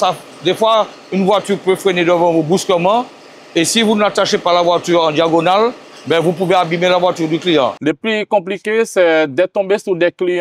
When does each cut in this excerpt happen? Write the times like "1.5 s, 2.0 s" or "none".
7.8 s